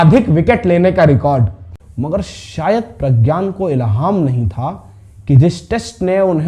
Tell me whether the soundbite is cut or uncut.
cut